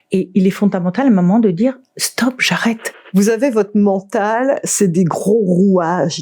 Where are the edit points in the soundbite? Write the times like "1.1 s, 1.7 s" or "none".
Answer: 2.9 s